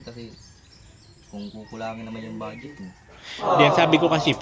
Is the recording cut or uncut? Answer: uncut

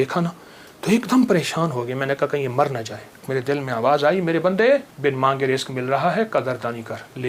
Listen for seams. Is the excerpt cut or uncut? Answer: cut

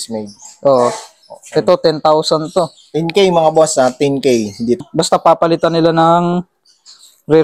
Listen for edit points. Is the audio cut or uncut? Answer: cut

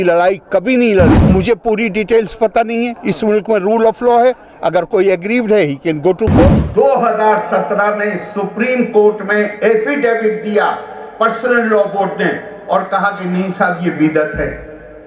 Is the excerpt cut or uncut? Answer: cut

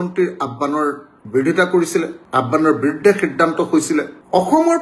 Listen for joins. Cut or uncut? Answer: uncut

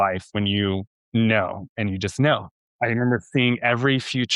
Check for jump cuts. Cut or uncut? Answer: cut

